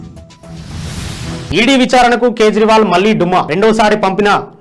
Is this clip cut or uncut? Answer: uncut